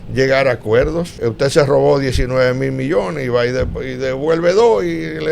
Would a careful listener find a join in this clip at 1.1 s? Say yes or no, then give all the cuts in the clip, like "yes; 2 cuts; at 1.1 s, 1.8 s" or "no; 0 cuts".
yes; 1 cut; at 1.1 s